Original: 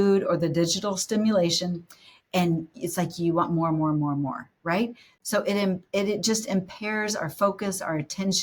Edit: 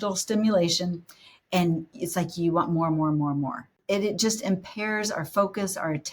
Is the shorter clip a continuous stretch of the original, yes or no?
no